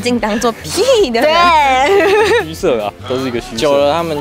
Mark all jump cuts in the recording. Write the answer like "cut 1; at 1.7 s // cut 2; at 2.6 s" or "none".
none